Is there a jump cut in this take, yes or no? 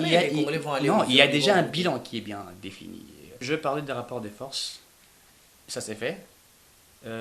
yes